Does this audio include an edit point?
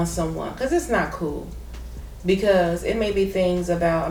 no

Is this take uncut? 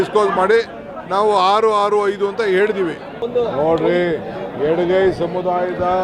no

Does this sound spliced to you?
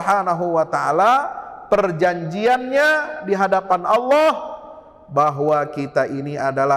no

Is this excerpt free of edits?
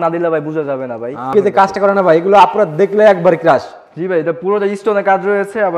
no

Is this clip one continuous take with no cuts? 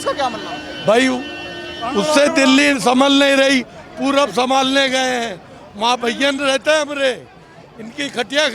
yes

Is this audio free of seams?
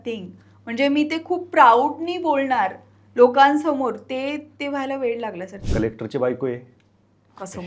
no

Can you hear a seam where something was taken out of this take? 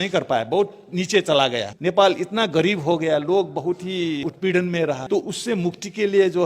yes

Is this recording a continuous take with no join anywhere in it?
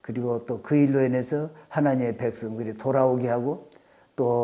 yes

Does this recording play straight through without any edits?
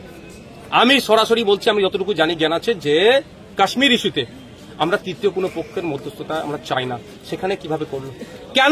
yes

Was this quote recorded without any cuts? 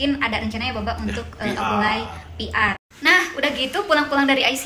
no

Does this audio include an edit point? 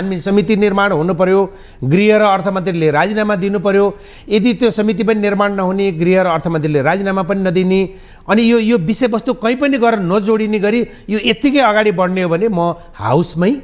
no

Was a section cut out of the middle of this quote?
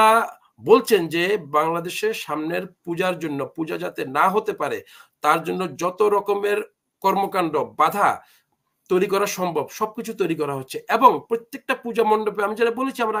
no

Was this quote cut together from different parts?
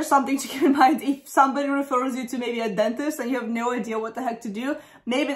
no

